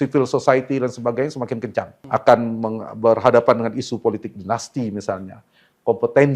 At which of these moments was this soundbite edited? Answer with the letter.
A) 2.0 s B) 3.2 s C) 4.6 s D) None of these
A